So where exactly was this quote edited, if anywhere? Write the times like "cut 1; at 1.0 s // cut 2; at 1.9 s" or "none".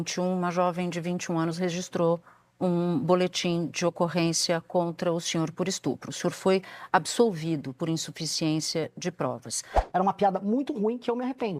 cut 1; at 9.8 s